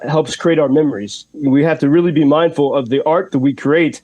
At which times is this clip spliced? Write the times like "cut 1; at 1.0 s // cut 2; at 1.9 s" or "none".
cut 1; at 1.3 s